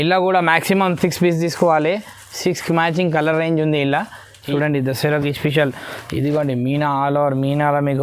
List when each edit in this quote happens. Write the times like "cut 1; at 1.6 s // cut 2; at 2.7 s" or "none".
cut 1; at 4.4 s